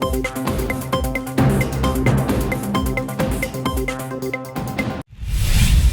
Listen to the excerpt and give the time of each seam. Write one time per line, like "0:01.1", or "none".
0:05.0